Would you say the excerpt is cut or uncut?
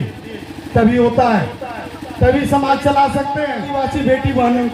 cut